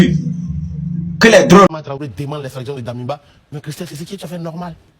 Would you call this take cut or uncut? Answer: cut